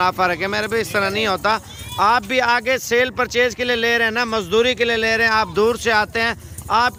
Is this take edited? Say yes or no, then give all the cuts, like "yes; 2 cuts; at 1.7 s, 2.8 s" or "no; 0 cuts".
no; 0 cuts